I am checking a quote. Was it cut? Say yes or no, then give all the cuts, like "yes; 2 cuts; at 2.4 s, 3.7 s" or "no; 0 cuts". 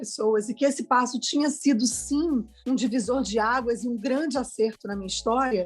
no; 0 cuts